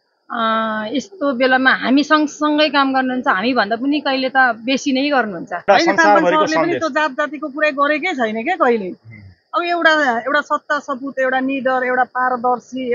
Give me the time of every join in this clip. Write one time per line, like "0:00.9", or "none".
0:05.7